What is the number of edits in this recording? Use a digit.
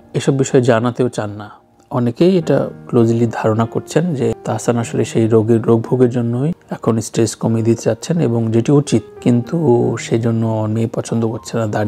1